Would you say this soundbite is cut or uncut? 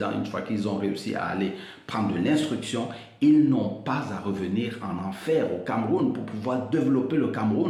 uncut